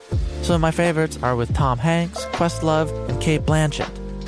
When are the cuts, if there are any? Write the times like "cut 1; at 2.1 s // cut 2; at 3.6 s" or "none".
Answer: none